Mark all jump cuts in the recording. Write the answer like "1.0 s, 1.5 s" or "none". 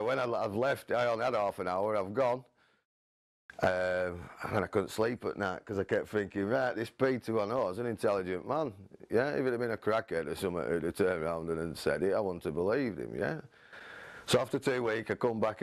none